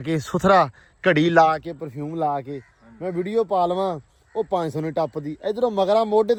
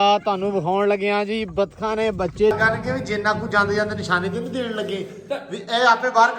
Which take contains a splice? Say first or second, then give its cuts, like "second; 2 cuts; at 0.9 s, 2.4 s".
second; 1 cut; at 2.5 s